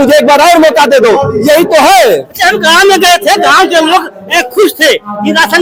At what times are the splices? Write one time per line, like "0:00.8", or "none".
none

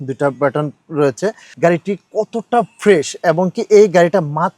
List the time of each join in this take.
0:01.4

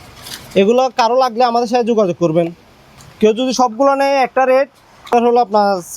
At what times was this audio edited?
0:05.1

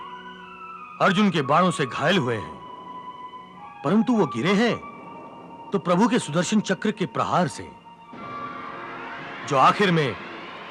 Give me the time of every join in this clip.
0:03.6

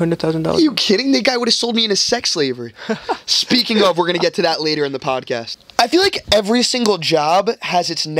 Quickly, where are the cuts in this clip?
0:05.6

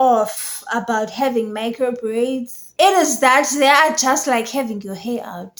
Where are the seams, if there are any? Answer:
none

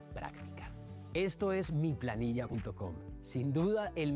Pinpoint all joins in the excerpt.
0:02.2

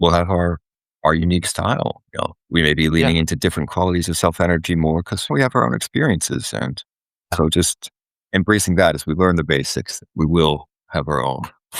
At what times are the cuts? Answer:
0:02.4
0:05.3
0:07.3

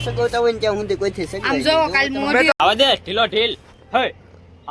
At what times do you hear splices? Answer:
0:02.5

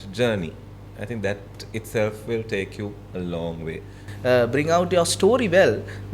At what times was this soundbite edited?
0:04.1

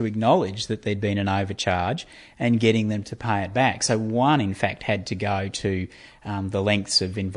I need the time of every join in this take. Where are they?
none

